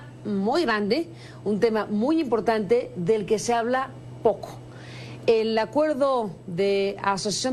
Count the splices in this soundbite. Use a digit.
1